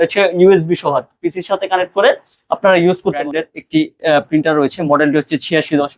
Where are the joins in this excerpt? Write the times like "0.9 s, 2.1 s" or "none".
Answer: 3.2 s